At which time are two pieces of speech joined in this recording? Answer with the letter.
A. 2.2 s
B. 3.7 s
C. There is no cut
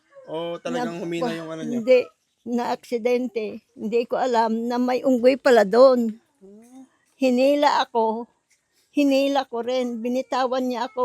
B